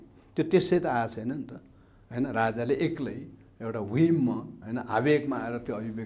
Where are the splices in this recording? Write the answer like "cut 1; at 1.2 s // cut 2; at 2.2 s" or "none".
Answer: none